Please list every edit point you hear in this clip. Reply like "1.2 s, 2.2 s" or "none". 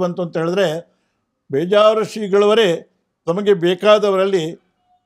none